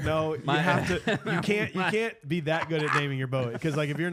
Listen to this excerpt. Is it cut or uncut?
uncut